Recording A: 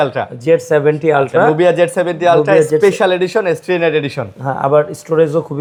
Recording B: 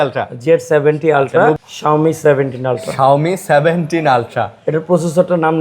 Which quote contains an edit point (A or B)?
B